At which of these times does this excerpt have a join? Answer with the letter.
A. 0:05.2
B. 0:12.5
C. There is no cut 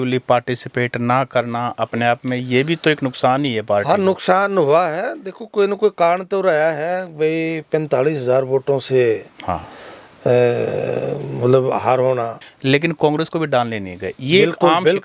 B